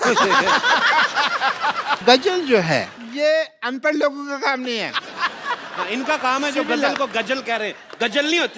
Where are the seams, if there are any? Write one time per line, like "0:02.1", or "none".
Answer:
0:02.0